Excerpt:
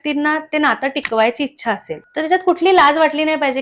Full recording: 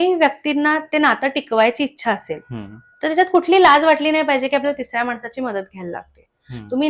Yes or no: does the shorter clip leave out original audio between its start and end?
yes